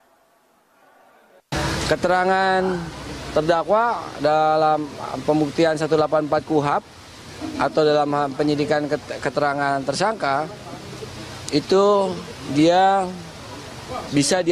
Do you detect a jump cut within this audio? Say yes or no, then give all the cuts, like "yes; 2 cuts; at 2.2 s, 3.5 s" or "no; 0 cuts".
yes; 1 cut; at 4.2 s